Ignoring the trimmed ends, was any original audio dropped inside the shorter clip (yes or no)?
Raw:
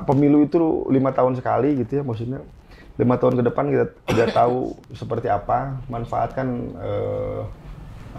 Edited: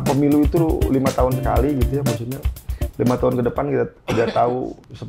no